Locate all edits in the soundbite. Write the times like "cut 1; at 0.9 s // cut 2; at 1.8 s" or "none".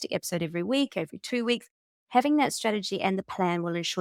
none